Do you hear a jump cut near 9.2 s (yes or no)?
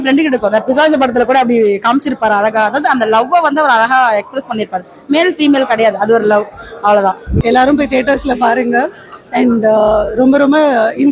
no